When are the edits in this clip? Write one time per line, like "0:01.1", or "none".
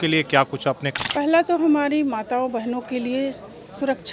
0:00.9